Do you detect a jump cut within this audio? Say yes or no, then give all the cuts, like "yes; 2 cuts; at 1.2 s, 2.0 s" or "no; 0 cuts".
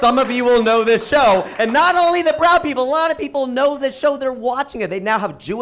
no; 0 cuts